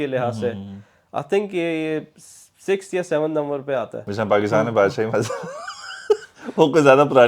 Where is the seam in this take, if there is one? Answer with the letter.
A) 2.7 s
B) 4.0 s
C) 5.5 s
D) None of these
B